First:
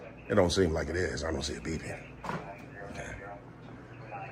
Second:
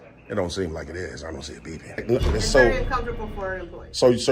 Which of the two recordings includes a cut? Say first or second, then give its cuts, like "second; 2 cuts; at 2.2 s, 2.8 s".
second; 1 cut; at 2.0 s